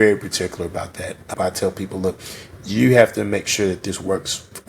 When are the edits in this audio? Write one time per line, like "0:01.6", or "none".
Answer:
0:01.3